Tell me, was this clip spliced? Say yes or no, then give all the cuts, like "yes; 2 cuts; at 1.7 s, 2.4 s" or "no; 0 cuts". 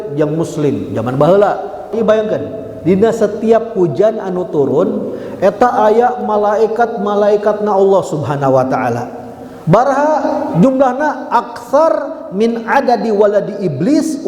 yes; 1 cut; at 1.9 s